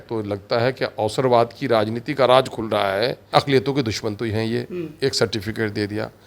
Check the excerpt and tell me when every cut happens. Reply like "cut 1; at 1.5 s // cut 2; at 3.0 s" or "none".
cut 1; at 3.3 s